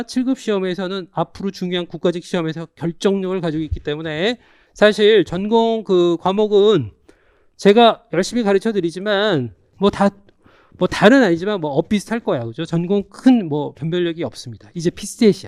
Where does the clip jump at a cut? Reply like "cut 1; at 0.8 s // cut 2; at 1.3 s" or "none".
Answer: none